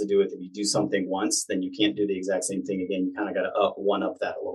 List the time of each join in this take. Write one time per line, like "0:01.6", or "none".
none